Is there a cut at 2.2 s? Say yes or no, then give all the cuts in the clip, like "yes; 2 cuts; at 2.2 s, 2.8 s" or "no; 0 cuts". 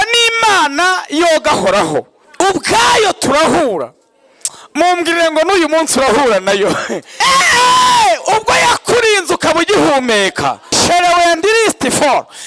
yes; 3 cuts; at 2.2 s, 7.0 s, 10.7 s